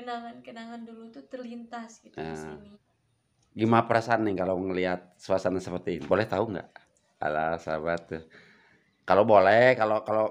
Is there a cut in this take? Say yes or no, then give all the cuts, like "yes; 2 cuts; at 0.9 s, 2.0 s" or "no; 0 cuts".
yes; 2 cuts; at 2.8 s, 6.0 s